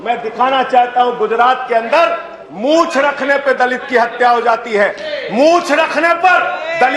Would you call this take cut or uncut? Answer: uncut